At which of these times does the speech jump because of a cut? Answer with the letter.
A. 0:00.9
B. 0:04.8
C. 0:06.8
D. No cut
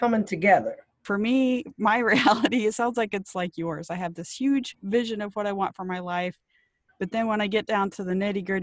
A